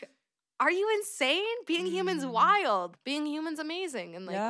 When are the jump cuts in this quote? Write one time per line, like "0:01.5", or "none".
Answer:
0:02.9